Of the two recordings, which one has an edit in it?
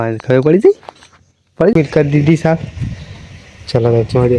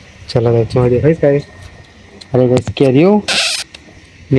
first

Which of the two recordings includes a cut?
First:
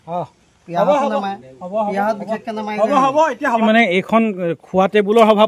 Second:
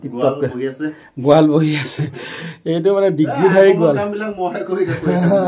first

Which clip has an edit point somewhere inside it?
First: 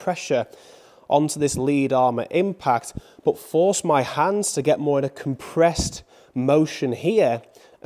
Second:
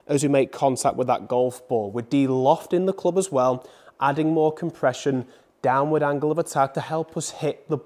second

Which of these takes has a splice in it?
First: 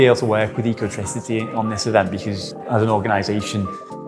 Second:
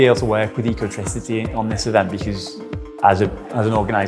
first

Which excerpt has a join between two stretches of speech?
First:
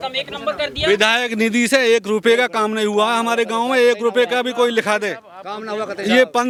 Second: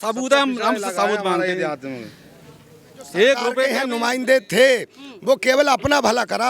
second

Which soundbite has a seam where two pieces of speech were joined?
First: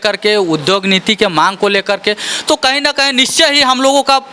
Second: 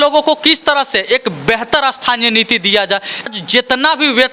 second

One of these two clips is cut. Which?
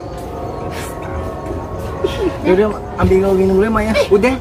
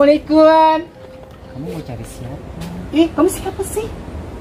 second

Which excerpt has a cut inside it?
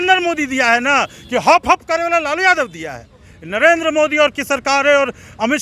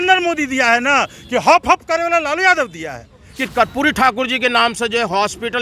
second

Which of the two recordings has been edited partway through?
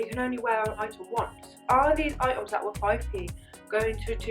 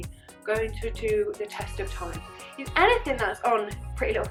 first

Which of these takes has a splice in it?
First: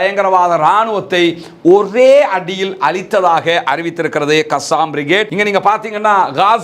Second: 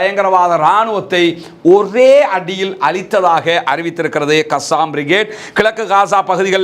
first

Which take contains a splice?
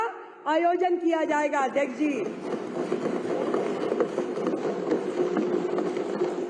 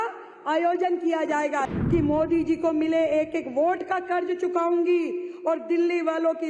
second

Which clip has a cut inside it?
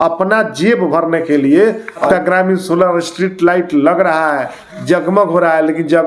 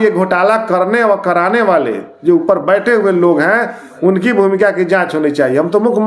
first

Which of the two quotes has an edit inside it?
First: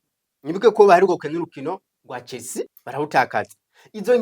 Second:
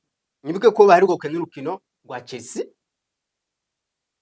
first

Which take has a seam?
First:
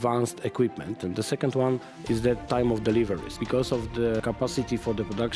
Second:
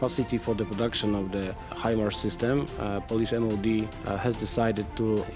first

